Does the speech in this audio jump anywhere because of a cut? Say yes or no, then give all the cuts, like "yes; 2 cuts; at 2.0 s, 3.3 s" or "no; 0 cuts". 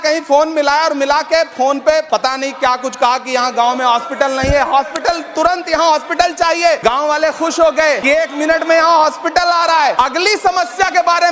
yes; 4 cuts; at 2.1 s, 6.8 s, 8.1 s, 9.9 s